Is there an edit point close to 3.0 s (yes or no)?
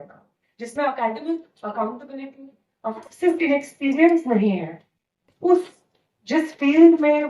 yes